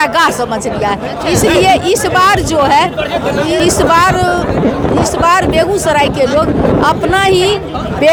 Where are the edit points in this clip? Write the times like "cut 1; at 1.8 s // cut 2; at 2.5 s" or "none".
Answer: none